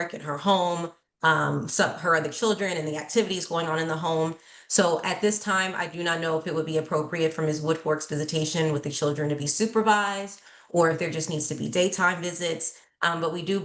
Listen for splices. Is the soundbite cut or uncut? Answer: uncut